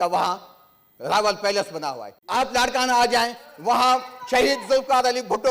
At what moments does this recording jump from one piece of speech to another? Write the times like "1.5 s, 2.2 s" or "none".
2.1 s